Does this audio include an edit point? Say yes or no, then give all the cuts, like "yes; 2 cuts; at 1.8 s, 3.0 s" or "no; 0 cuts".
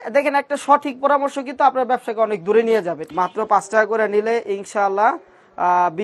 yes; 1 cut; at 3.0 s